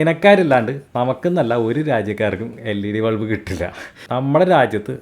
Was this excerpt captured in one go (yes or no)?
no